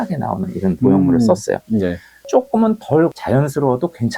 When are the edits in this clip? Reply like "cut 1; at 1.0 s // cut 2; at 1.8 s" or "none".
cut 1; at 2.1 s

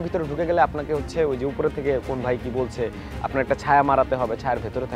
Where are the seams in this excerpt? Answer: none

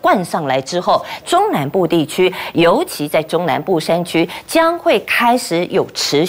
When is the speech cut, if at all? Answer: cut 1; at 1.2 s

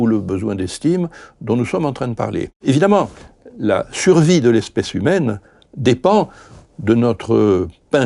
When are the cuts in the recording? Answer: cut 1; at 2.5 s

